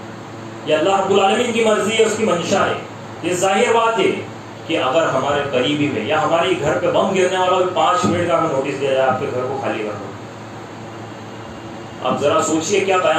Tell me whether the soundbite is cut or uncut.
uncut